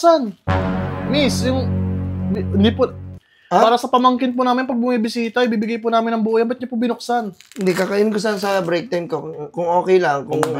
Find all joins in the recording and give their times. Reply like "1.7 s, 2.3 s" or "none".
none